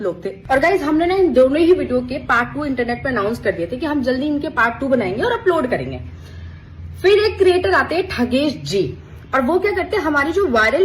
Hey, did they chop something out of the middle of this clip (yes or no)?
no